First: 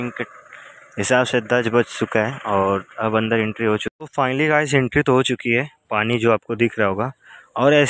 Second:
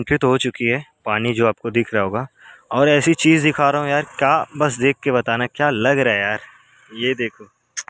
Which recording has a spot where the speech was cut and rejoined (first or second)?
first